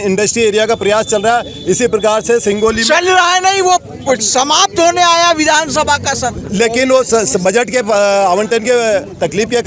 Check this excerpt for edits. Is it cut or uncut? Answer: uncut